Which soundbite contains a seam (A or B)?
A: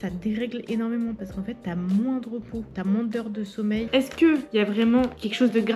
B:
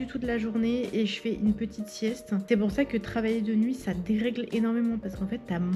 A